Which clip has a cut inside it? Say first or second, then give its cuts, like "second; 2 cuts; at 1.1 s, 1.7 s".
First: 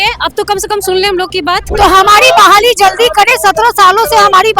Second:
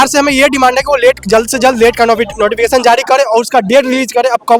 first; 1 cut; at 1.6 s